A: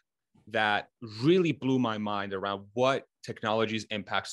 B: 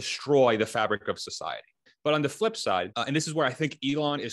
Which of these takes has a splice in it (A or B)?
B